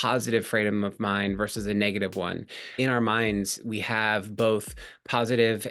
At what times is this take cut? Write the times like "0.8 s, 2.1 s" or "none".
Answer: 2.7 s